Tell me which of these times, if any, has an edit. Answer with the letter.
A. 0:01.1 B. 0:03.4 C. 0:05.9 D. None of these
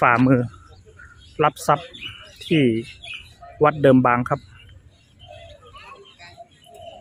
C